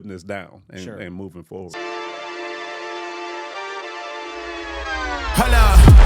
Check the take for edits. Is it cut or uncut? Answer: cut